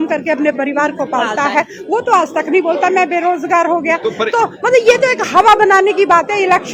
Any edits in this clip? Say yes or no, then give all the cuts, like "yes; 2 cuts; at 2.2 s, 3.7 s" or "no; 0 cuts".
no; 0 cuts